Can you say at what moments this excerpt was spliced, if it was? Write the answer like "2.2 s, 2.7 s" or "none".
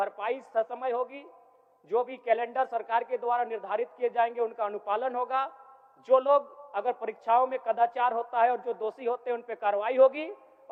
none